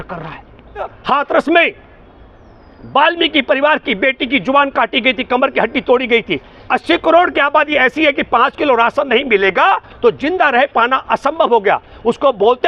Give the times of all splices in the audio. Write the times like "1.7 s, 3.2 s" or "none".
1.0 s, 6.5 s